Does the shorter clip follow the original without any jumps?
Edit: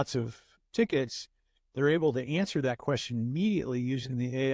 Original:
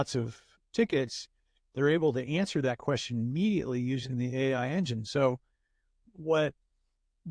yes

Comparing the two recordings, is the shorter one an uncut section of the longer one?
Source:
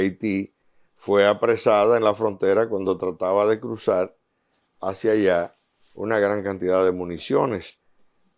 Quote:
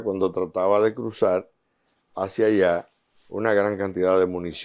yes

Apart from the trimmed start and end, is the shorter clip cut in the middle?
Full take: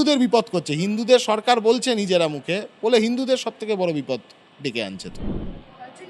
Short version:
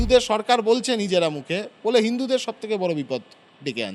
no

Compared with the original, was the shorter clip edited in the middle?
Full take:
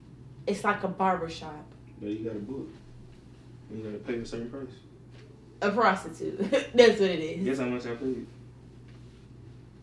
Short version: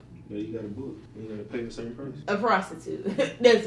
yes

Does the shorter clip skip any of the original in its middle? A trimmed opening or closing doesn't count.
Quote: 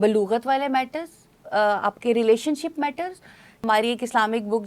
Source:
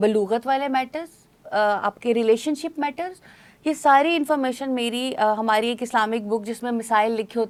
yes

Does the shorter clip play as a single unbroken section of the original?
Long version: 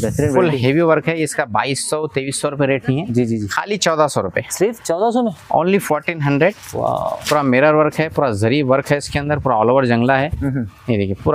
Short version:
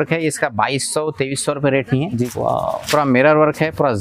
no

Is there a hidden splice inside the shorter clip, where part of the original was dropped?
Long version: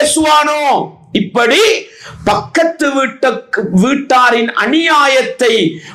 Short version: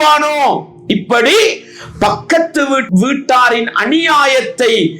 yes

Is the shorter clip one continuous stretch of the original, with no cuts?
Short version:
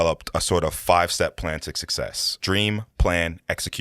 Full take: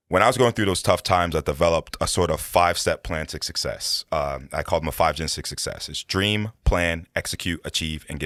no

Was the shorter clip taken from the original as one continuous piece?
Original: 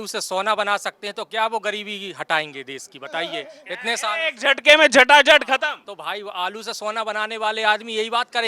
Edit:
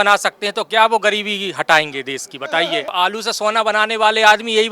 no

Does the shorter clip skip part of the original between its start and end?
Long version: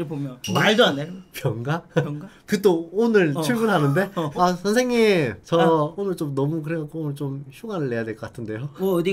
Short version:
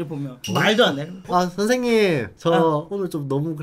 yes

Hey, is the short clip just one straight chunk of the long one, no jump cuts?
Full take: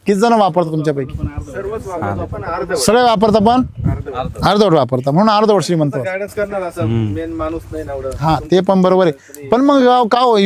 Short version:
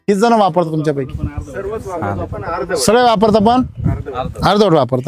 yes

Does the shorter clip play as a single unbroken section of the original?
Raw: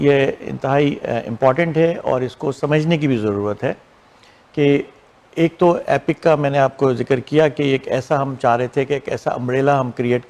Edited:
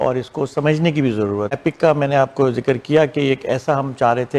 no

